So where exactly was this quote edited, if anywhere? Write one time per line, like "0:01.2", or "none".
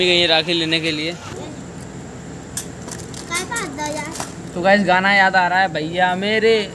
0:01.3